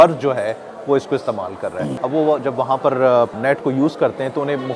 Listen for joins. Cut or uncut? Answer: cut